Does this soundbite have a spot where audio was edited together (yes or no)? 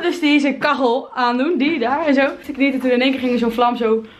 yes